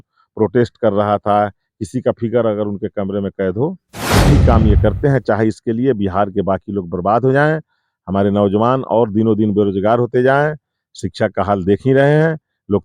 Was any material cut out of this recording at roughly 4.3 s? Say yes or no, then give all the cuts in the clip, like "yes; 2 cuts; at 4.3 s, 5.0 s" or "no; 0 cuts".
yes; 1 cut; at 4.3 s